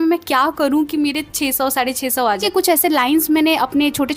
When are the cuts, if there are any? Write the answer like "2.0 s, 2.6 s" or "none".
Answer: 2.4 s